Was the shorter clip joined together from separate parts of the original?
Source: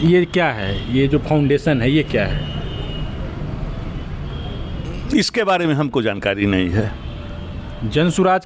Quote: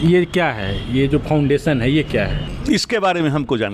yes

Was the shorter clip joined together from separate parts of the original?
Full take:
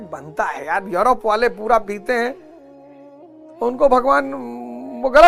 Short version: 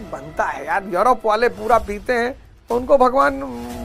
yes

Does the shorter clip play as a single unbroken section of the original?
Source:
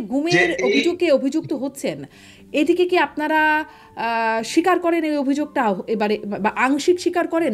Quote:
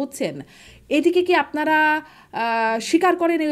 yes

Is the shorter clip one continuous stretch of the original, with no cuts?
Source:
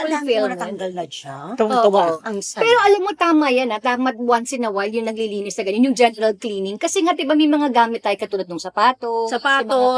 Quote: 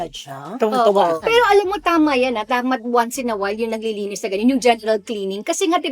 no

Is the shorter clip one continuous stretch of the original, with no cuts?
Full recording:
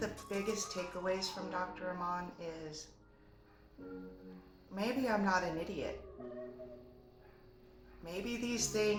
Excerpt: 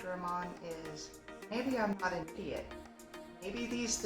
no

